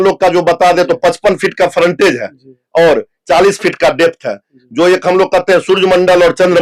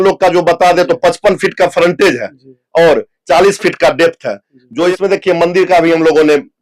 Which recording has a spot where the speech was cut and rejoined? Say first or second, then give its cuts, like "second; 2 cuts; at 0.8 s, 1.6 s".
second; 1 cut; at 4.9 s